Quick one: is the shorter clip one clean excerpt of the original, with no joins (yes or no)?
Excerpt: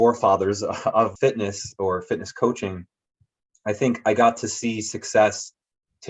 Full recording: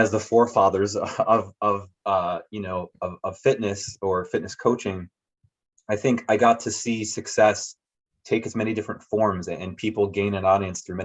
no